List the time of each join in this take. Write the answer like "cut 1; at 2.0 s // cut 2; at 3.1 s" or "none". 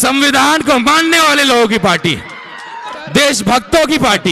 cut 1; at 2.9 s